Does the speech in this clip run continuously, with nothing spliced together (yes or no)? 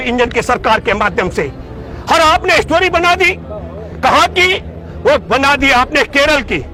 yes